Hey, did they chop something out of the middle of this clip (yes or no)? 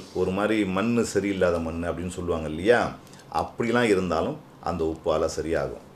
no